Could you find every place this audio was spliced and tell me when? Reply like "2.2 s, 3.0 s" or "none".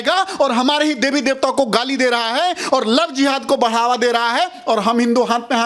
none